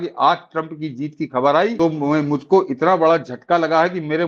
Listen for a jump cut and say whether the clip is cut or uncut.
cut